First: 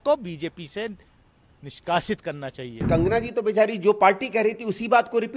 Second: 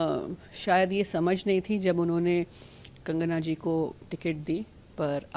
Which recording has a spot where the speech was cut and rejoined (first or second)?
first